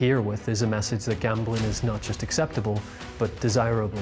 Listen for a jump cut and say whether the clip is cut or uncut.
uncut